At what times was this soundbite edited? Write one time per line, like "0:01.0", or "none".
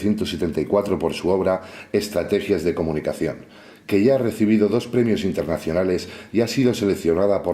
0:02.3